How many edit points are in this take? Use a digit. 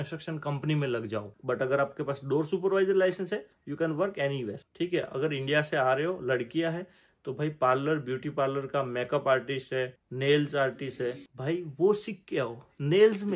2